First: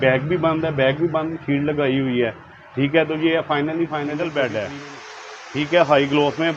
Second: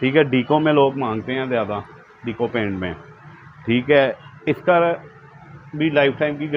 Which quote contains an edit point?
first; 1 cut; at 4.1 s

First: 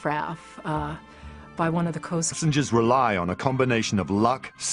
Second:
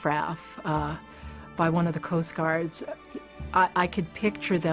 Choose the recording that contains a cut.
second; 1 cut; at 2.3 s

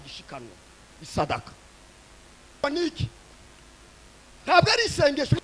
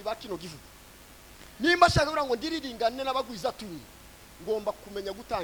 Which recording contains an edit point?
first; 1 cut; at 2.6 s

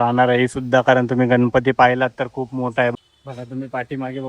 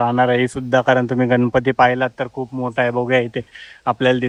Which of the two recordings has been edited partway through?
first; 1 cut; at 2.9 s

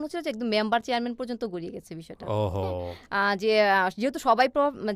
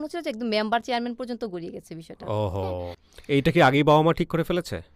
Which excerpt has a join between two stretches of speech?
second; 1 cut; at 3.0 s

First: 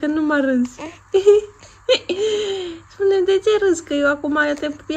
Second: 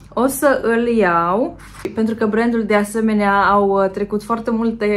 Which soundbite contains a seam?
second; 1 cut; at 2.1 s

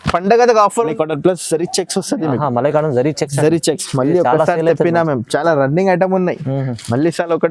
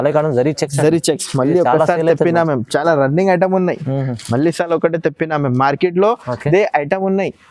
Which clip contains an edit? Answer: first; 1 cut; at 0.9 s

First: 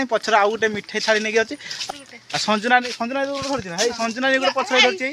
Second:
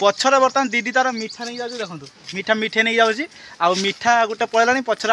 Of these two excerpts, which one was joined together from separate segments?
first; 1 cut; at 1.8 s

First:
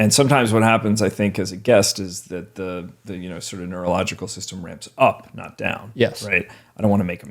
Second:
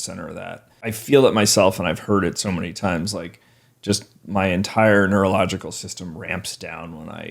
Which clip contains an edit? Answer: second; 1 cut; at 0.9 s

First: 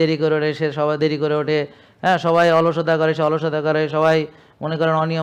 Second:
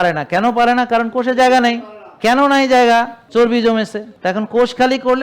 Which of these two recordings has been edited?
second; 3 cuts; at 2.2 s, 3.2 s, 4.1 s

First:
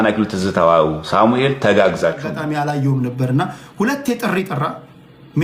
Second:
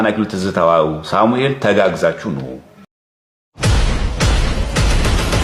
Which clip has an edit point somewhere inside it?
first; 1 cut; at 2.3 s

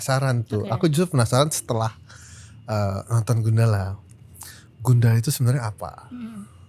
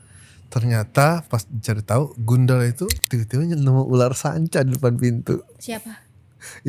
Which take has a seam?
second; 1 cut; at 3.0 s

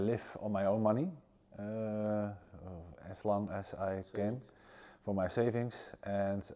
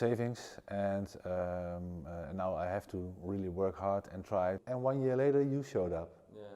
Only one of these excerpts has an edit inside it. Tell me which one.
second; 1 cut; at 4.6 s

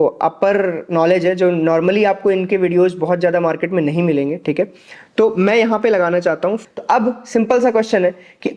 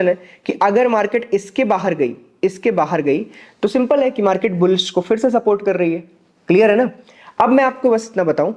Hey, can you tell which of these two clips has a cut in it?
first; 1 cut; at 6.6 s

